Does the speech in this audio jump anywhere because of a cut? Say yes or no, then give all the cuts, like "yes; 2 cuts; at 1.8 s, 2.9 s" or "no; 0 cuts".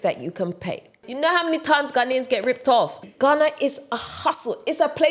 yes; 2 cuts; at 1.1 s, 3.0 s